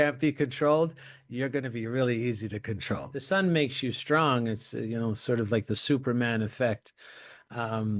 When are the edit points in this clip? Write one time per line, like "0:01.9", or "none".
0:03.1